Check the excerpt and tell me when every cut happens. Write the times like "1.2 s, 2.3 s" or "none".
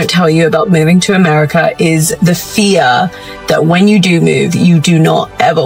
none